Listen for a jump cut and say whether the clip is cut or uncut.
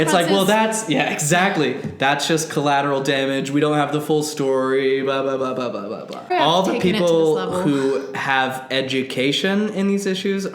cut